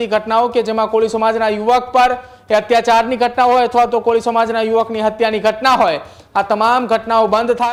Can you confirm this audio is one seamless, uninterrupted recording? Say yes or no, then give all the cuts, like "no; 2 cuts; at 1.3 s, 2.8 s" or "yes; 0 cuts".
yes; 0 cuts